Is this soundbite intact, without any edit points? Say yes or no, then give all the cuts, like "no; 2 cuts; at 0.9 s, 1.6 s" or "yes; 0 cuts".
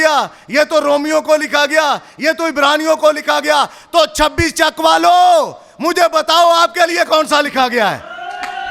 yes; 0 cuts